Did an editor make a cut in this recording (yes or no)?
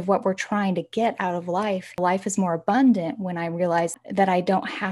yes